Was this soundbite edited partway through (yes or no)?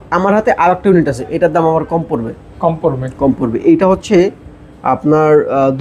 no